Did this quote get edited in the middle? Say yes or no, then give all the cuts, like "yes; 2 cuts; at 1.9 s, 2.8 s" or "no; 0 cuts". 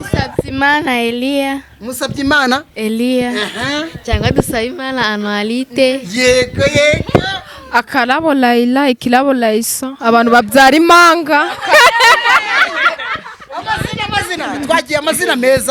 no; 0 cuts